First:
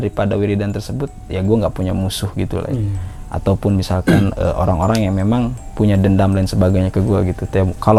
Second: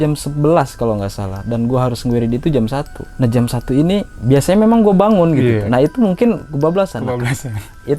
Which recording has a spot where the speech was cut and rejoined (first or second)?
second